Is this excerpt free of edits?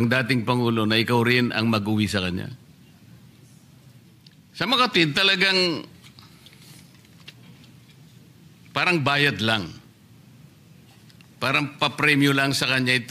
no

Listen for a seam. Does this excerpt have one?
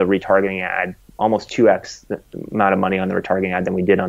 no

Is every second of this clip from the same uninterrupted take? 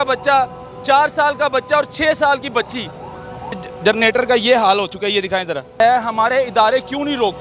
no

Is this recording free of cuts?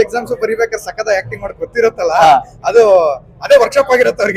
yes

